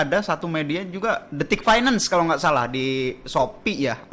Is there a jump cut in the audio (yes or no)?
no